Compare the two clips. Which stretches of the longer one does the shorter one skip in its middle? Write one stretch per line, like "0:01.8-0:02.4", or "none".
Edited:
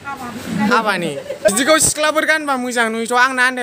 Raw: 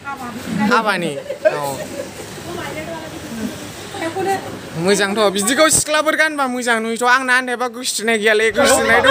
0:01.5-0:05.4